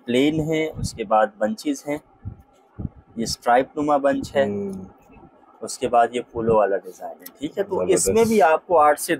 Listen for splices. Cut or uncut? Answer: uncut